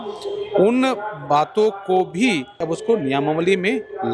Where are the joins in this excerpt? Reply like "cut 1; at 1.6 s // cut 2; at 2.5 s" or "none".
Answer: cut 1; at 2.6 s